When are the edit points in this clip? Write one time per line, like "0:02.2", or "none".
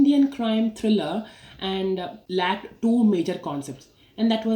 0:02.5

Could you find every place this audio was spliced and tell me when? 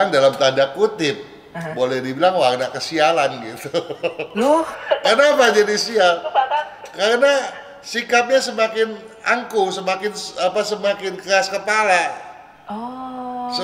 none

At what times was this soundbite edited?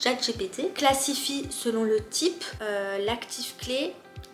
0:00.7
0:02.5

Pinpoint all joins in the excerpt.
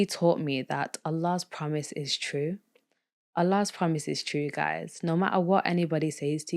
none

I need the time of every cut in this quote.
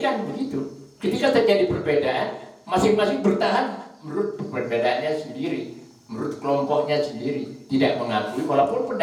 none

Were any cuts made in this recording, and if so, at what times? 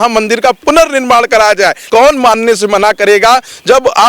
0:01.8

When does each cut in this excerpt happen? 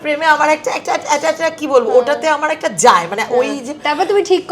none

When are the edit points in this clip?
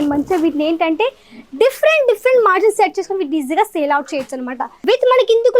0:04.7

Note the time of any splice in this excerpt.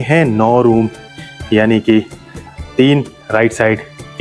none

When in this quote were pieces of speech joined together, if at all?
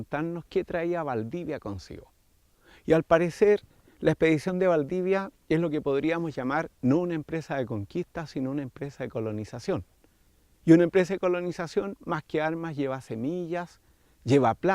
0:08.8

